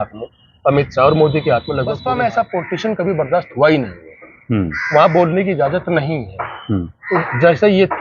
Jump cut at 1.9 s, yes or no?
yes